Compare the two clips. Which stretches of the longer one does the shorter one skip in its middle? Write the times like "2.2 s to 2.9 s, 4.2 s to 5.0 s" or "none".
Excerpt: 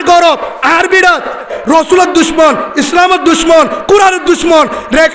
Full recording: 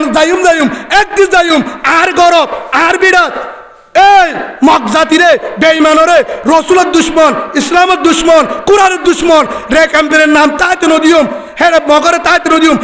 3.7 s to 6.3 s